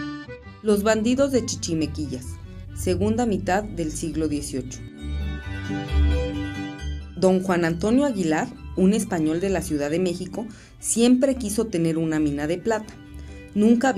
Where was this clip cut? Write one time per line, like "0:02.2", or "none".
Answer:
none